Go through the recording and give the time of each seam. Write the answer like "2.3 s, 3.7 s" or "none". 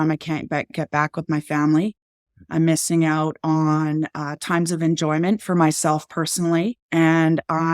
6.8 s